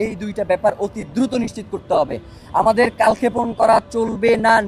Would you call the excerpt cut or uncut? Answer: uncut